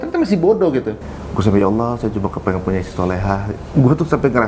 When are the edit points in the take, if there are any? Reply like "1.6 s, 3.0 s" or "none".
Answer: 1.0 s, 3.6 s